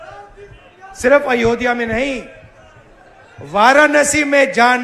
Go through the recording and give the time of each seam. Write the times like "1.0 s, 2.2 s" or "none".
none